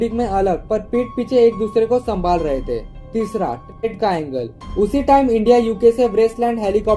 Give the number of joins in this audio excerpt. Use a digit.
0